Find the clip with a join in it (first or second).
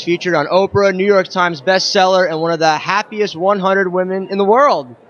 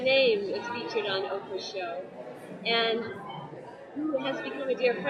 first